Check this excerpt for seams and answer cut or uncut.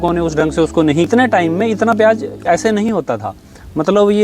cut